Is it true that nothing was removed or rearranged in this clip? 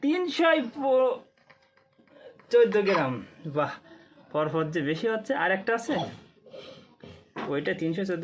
yes; 0 cuts

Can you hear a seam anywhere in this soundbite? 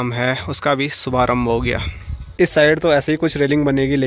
yes; 1 cut; at 2.3 s

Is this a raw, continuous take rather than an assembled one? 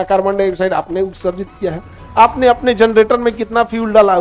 yes; 0 cuts

